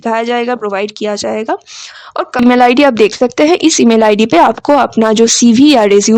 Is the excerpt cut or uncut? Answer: cut